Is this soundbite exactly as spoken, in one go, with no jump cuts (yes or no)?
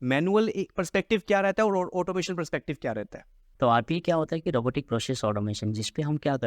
no